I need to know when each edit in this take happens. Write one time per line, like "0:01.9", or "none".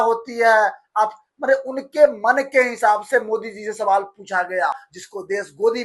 none